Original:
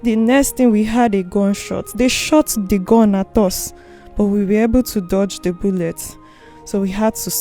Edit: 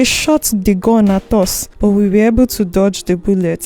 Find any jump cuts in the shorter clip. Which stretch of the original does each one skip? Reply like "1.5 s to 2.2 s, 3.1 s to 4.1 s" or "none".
3.7 s to 4.0 s